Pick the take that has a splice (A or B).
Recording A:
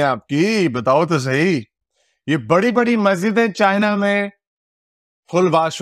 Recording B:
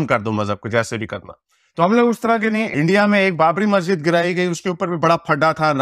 B